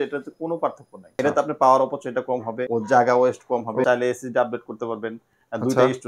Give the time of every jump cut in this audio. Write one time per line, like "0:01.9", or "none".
0:01.2
0:02.6
0:03.8